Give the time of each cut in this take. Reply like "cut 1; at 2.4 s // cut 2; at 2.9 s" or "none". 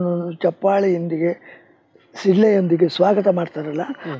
none

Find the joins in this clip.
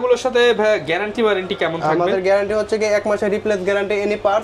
none

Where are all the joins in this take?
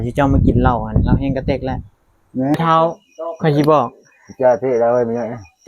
cut 1; at 2.6 s

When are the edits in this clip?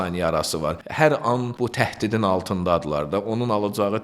cut 1; at 0.8 s // cut 2; at 1.5 s

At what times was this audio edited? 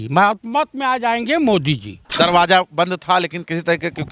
cut 1; at 1.8 s

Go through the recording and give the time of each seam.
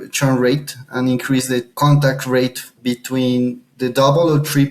cut 1; at 1.7 s // cut 2; at 2.8 s // cut 3; at 3.7 s

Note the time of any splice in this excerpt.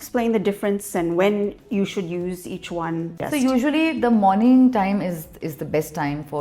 cut 1; at 3.2 s

